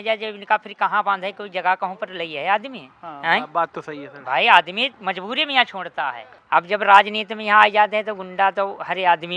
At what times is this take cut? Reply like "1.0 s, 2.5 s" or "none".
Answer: 6.3 s